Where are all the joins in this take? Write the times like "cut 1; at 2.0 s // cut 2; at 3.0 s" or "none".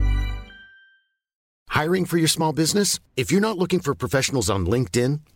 cut 1; at 1.5 s